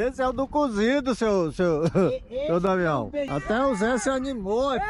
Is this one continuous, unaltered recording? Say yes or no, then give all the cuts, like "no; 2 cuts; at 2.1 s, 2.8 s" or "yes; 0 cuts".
no; 1 cut; at 3.3 s